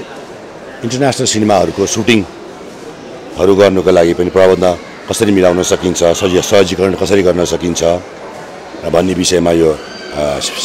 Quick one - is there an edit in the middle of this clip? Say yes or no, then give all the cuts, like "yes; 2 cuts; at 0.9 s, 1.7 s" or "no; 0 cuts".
no; 0 cuts